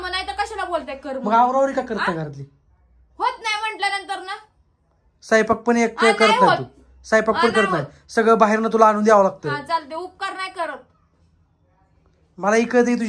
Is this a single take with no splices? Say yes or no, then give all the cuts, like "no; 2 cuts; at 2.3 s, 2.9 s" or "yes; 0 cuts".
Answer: yes; 0 cuts